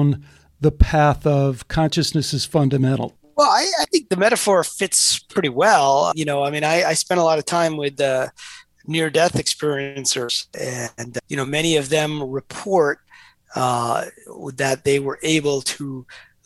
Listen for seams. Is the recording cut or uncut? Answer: cut